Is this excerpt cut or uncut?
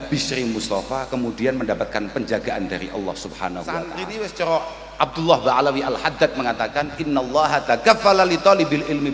cut